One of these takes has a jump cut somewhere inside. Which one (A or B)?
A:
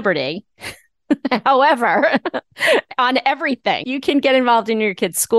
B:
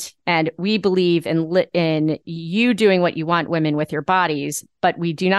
A